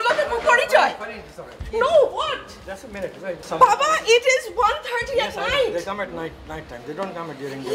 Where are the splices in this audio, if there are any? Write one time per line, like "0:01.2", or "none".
0:03.4